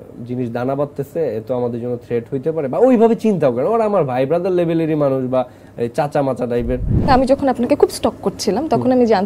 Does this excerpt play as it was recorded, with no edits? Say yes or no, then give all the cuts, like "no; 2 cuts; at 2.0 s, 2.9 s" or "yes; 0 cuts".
no; 1 cut; at 7.1 s